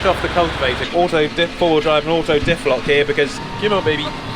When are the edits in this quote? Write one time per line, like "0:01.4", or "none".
0:00.8
0:03.4